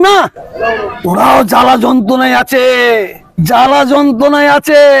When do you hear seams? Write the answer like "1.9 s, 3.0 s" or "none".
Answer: 0.9 s, 3.2 s